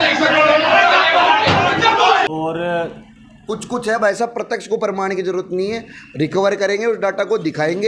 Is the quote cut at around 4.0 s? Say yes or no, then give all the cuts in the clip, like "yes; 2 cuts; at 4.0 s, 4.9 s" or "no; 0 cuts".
no; 1 cut; at 2.2 s